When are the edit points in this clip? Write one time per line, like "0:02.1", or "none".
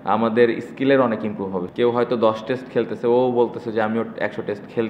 0:01.6